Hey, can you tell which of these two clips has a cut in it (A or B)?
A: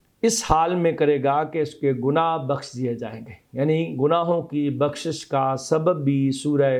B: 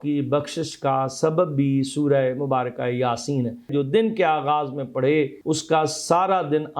B